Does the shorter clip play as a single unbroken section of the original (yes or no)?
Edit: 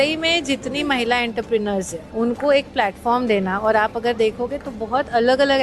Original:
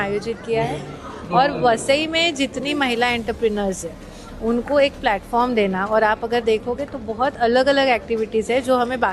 no